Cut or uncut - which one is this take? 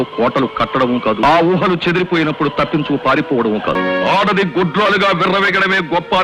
cut